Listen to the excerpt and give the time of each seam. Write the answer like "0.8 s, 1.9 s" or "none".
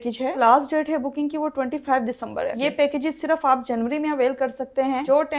none